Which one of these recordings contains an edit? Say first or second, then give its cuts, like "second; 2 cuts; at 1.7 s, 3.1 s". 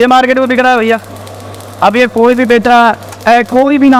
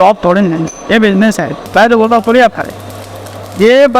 second; 1 cut; at 1.7 s